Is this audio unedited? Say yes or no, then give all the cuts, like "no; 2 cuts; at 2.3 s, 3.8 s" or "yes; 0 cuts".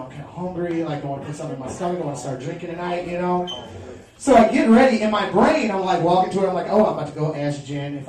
no; 1 cut; at 4.2 s